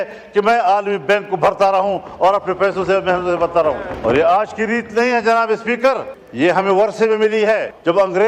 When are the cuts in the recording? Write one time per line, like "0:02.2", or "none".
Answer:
none